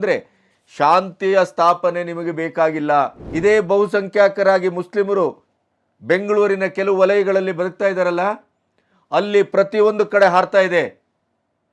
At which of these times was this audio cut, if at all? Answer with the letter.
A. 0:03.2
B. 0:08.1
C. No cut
A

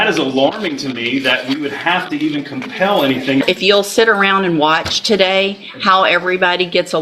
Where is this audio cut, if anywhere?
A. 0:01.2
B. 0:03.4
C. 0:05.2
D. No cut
B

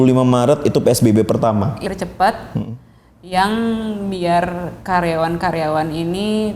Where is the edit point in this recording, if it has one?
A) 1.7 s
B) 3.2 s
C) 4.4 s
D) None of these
A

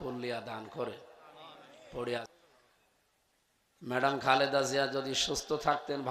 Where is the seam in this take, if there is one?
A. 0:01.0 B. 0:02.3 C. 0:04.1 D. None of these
B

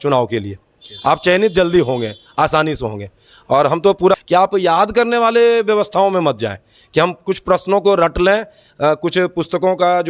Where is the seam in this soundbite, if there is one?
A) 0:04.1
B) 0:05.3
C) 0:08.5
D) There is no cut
A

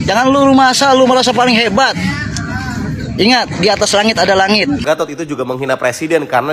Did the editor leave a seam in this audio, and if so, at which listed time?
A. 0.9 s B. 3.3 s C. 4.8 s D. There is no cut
C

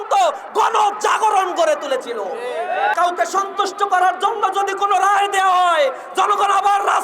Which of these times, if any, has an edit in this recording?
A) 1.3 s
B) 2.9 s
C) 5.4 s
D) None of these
B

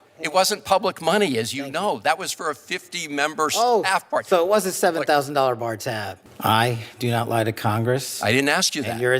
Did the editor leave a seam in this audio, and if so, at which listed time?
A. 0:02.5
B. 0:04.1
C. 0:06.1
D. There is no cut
C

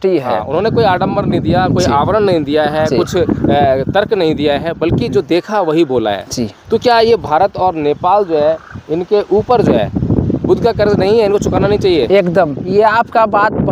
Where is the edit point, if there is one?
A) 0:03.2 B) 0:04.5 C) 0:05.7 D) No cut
D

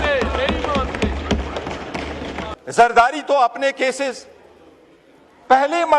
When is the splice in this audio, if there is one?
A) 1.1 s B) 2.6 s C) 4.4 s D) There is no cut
B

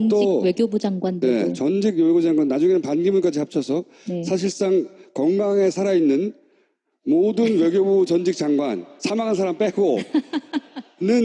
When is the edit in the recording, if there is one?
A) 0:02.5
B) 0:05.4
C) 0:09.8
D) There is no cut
B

